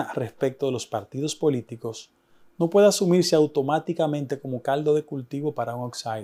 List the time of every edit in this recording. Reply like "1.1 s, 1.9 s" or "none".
none